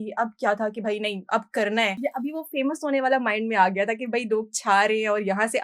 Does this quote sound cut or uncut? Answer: cut